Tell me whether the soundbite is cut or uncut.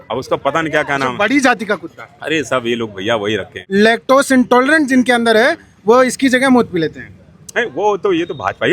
cut